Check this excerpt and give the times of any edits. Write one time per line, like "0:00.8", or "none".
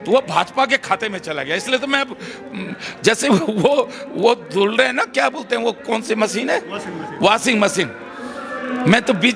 none